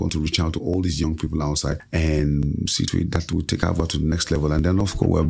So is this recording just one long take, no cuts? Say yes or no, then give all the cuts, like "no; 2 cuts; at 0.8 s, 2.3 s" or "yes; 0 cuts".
no; 1 cut; at 1.8 s